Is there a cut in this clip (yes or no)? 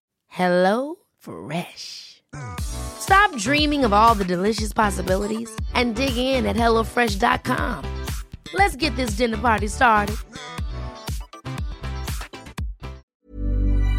yes